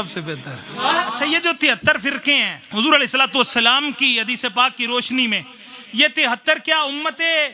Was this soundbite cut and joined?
yes; 2 cuts; at 1.2 s, 2.6 s

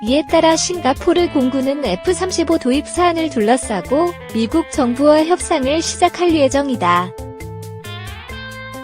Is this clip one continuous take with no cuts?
no; 1 cut; at 7.1 s

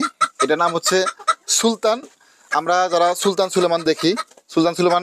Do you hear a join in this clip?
no; 0 cuts

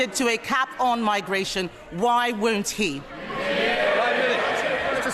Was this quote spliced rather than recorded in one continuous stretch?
no; 0 cuts

